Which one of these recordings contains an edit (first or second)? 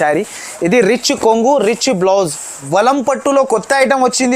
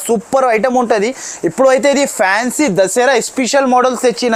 first